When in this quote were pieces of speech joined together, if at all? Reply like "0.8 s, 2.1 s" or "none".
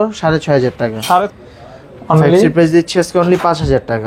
1.3 s